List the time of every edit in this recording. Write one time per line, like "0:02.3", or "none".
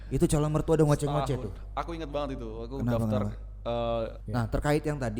0:04.2